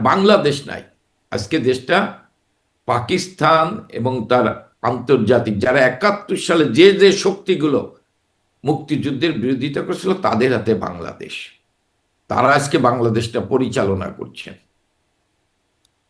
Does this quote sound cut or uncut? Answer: uncut